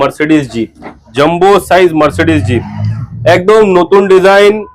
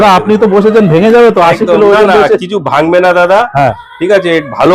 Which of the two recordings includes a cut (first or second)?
first